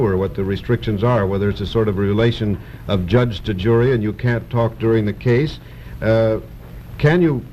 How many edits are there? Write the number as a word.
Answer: one